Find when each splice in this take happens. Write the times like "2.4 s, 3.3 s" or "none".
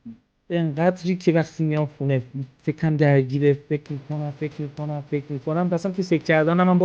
none